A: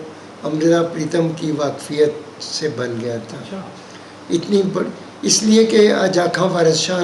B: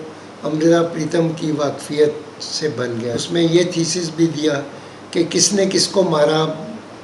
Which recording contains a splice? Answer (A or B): B